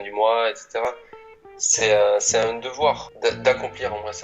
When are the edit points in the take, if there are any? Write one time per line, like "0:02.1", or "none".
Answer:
0:03.1